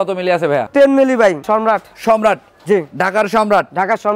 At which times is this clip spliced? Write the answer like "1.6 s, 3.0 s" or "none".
1.4 s